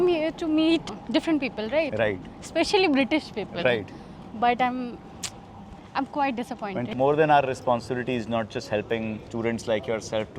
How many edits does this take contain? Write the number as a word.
one